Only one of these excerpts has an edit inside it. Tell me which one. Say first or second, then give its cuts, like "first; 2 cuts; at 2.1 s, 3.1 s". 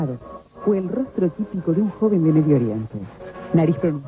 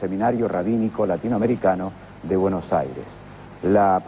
second; 1 cut; at 2.3 s